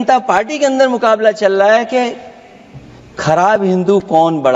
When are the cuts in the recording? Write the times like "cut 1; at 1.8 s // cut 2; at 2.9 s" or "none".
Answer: none